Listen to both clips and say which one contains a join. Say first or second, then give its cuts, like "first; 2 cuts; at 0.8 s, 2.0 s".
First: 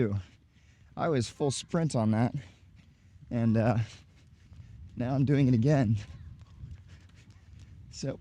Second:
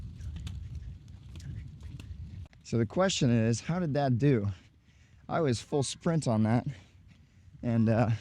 second; 1 cut; at 2.5 s